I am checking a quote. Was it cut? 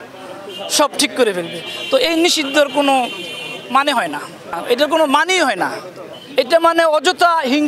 yes; 1 cut; at 4.6 s

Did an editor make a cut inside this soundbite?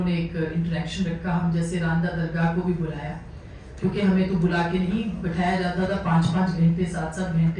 no; 0 cuts

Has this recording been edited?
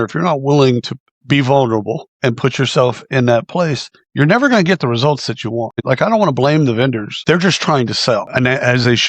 yes; 3 cuts; at 5.7 s, 7.1 s, 8.3 s

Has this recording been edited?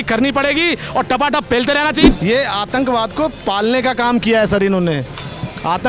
yes; 1 cut; at 2.0 s

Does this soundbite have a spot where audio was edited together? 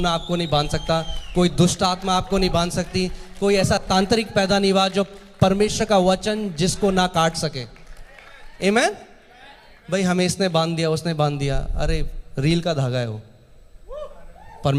no; 0 cuts

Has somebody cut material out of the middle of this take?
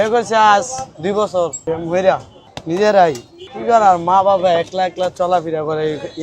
yes; 2 cuts; at 1.6 s, 2.3 s

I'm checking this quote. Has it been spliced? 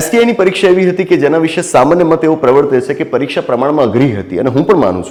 no; 0 cuts

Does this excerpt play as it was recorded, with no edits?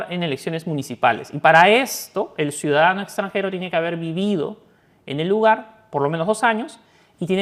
yes; 0 cuts

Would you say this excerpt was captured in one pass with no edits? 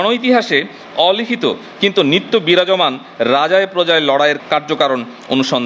no; 1 cut; at 4.4 s

